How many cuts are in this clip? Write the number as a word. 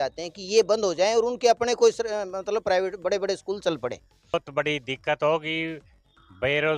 one